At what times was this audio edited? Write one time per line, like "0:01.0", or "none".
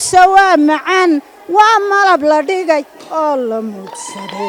none